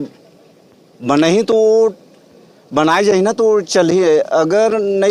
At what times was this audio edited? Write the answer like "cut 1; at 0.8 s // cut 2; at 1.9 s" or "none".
none